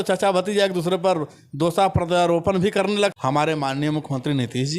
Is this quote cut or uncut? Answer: cut